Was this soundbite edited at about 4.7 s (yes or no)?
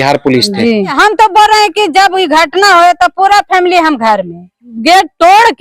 yes